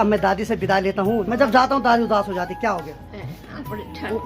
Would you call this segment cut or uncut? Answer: cut